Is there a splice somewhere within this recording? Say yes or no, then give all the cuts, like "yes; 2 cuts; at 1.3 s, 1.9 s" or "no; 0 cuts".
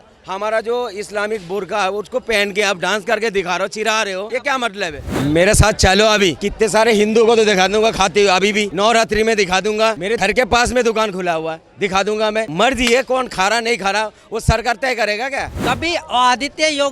yes; 7 cuts; at 4.3 s, 5.0 s, 6.4 s, 8.7 s, 10.1 s, 12.5 s, 15.5 s